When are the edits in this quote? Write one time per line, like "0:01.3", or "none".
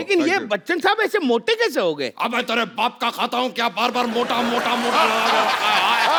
none